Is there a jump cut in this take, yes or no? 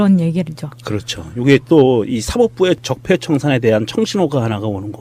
no